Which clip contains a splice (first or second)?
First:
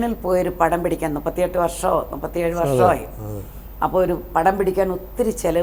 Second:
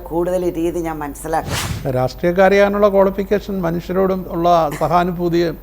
second